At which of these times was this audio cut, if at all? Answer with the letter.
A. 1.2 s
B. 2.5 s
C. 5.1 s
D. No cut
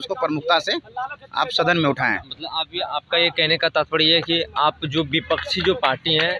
D